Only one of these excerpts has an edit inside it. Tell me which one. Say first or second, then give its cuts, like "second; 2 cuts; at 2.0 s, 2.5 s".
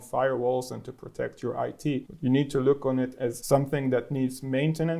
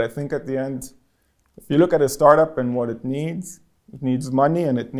first; 2 cuts; at 2.1 s, 3.4 s